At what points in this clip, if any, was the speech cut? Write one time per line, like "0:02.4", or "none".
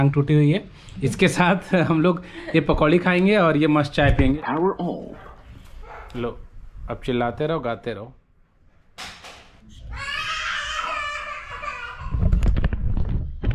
0:04.3
0:09.6

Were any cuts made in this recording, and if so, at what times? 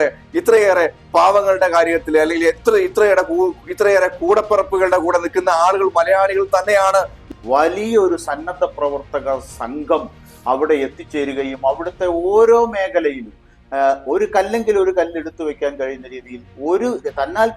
0:07.2

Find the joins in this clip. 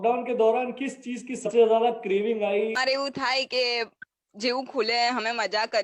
0:01.5
0:02.9

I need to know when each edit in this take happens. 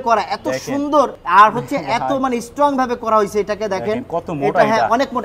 0:01.2

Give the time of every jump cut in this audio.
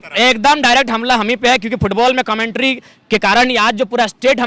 none

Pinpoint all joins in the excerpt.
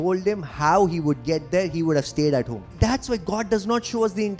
0:02.6

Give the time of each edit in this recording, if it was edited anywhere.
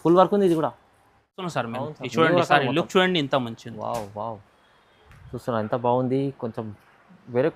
0:01.4

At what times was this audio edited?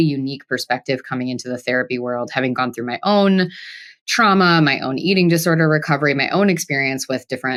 none

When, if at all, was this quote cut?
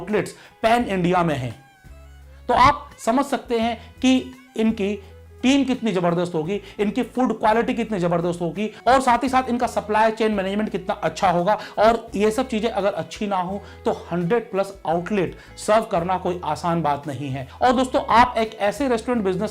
none

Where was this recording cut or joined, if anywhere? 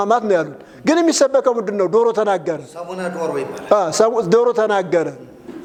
none

